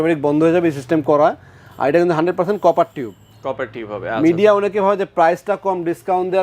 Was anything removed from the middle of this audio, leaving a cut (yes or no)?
no